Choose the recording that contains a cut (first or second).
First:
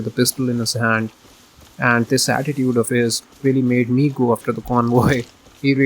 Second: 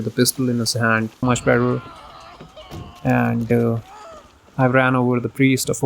second